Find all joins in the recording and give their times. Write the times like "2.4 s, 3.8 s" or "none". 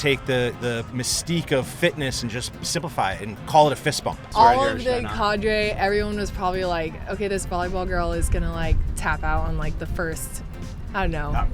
4.2 s